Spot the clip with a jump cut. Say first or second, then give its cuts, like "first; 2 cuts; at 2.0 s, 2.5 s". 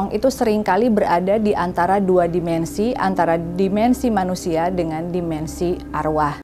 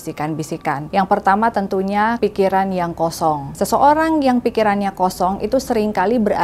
second; 3 cuts; at 0.8 s, 2.2 s, 3.5 s